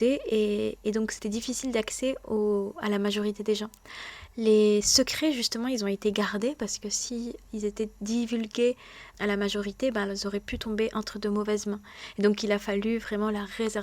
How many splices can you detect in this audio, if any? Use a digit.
1